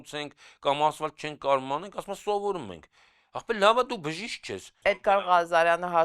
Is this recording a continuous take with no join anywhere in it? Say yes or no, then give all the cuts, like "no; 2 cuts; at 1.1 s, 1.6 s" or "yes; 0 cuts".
no; 1 cut; at 5.0 s